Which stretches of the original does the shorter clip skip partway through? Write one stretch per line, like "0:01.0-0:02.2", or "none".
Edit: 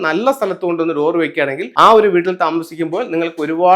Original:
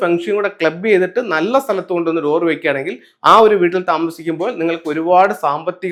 0:02.9-0:03.1